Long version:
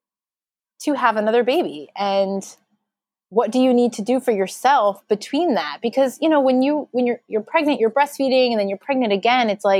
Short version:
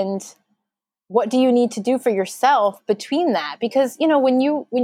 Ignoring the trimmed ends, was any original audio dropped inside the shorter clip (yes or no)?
no